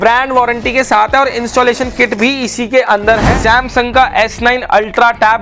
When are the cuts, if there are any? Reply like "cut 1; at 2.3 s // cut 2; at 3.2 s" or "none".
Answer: cut 1; at 3.3 s

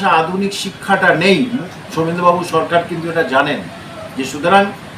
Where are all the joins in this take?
cut 1; at 1.6 s

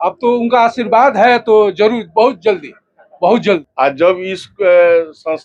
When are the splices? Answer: cut 1; at 3.7 s

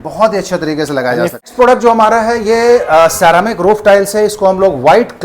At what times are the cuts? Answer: cut 1; at 1.4 s

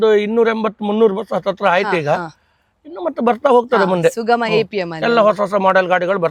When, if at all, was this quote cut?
none

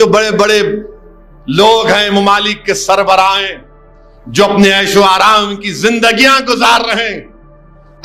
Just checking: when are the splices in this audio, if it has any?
none

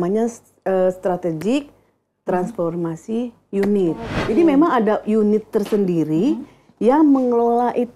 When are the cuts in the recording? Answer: cut 1; at 4.1 s

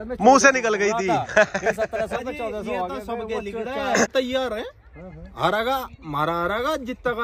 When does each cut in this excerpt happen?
cut 1; at 4.1 s

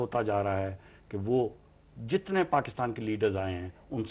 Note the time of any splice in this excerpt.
none

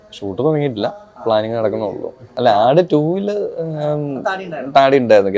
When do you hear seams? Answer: cut 1; at 2.3 s

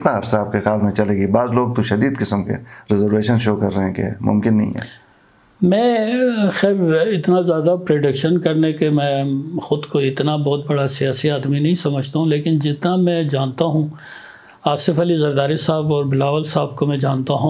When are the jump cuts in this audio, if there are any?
none

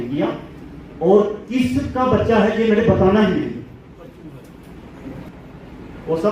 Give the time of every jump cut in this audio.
cut 1; at 5.3 s

